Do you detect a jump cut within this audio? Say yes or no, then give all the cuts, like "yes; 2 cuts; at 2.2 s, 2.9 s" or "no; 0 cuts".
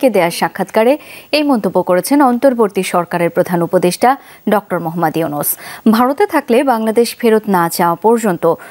no; 0 cuts